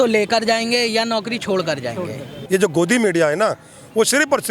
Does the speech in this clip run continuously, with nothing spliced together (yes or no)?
no